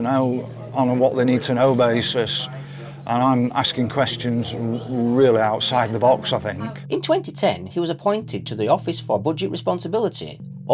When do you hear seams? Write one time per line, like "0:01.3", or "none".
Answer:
0:06.7